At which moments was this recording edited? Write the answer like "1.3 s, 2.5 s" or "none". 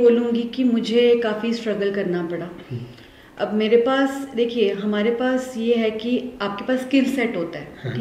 none